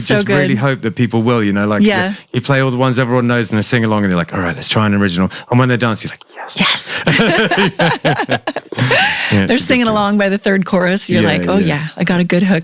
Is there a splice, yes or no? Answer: no